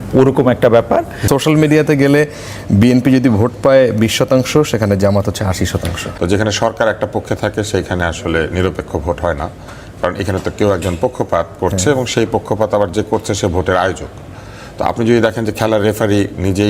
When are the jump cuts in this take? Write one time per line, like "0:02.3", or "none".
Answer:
0:01.2
0:06.0

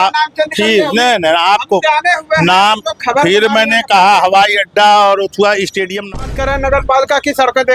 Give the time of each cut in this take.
0:06.2

